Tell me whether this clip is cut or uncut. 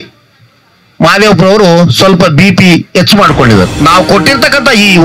cut